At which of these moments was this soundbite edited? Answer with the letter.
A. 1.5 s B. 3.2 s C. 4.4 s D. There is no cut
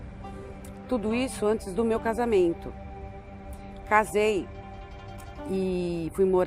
A